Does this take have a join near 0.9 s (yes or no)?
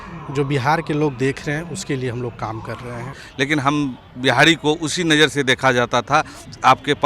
no